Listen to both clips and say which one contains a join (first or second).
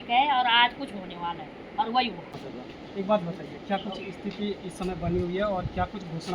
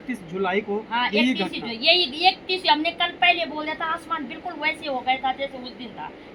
first